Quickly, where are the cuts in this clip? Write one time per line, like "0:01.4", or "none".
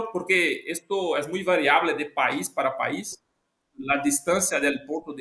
none